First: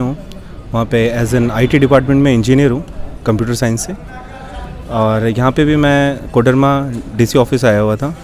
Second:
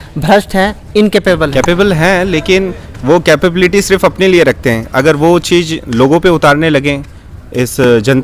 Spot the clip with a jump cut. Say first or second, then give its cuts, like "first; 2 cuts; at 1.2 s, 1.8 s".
second; 1 cut; at 1.5 s